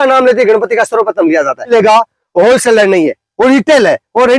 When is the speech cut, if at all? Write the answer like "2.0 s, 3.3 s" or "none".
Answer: 1.7 s